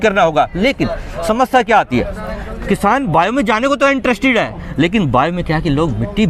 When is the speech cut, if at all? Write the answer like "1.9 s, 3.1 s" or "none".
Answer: none

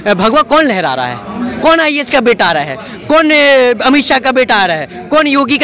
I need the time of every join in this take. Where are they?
none

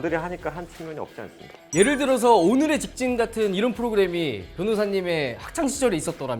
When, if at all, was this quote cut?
1.7 s

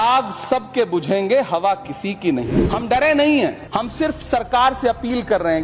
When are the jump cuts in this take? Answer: 2.5 s, 3.6 s

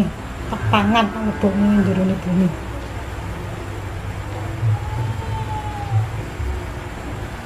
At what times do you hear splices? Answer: none

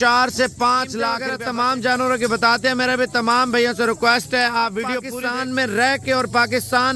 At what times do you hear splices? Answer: 1.3 s, 5.1 s

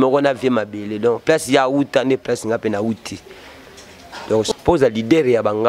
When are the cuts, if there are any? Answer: 4.5 s

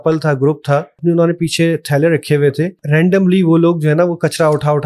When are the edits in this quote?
1.0 s, 2.8 s

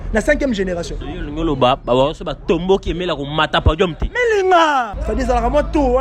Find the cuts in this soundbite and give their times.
5.0 s

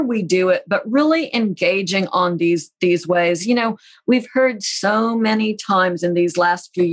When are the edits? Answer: none

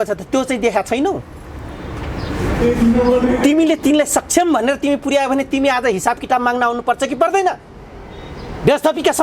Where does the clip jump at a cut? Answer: none

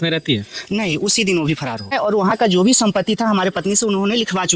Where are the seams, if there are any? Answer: 1.9 s

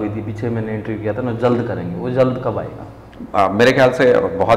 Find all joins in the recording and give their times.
none

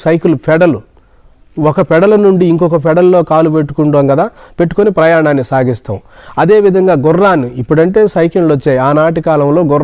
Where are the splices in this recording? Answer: none

